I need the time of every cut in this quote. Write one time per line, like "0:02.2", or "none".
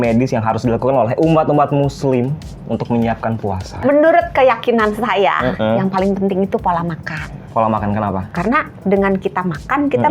0:03.8
0:07.4
0:08.3

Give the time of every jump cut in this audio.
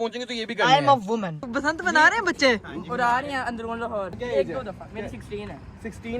0:01.4
0:04.2

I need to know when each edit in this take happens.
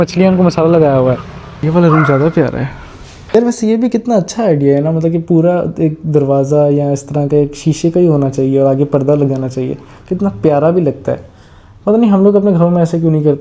0:01.6
0:03.3

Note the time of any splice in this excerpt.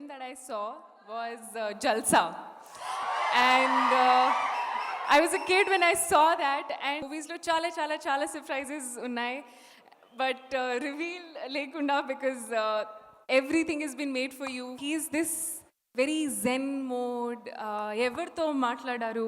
0:07.1
0:14.8

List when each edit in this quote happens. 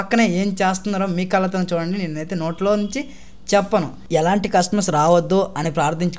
0:04.1

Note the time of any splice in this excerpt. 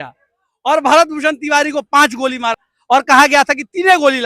0:02.5

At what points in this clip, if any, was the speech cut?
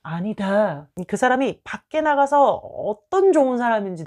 0:00.9

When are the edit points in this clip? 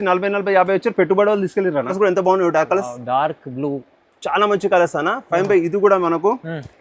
0:01.9

